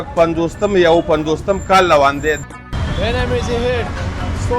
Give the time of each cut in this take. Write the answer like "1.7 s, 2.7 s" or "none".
2.4 s

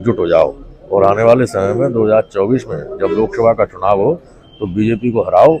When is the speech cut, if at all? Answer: none

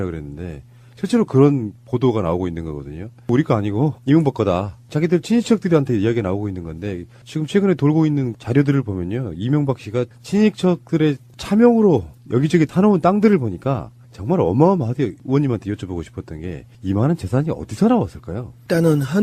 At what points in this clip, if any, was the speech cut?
10.0 s

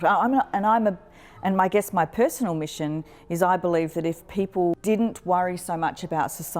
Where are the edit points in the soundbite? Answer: 4.8 s

